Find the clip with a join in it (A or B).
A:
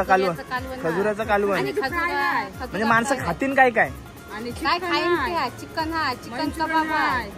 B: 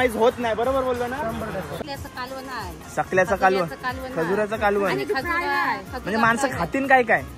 B